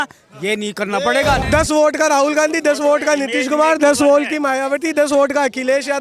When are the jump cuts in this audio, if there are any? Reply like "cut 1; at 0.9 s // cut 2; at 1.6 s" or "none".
cut 1; at 1.4 s